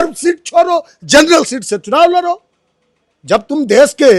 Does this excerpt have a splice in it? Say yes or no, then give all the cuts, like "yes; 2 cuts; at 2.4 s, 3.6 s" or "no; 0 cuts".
no; 0 cuts